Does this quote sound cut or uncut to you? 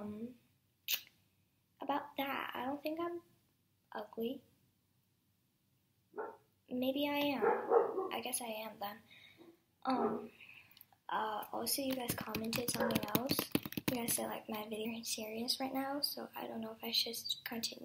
uncut